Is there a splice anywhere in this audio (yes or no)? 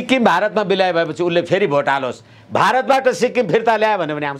no